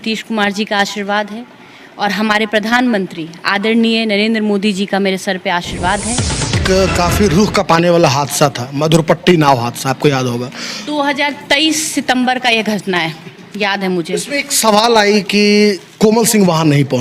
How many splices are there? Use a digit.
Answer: 1